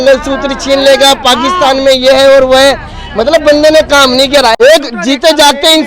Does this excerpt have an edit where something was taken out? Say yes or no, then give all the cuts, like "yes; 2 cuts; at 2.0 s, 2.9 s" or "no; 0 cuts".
yes; 1 cut; at 4.5 s